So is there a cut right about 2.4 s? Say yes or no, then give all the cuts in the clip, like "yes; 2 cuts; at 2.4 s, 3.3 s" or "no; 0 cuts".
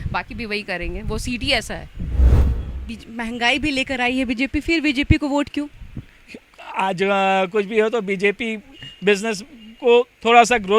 yes; 1 cut; at 2.4 s